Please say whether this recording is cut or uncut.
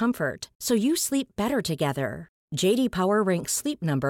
uncut